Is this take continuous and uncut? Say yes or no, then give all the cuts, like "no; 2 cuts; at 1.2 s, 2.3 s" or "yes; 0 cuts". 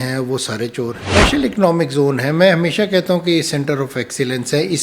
no; 1 cut; at 1.1 s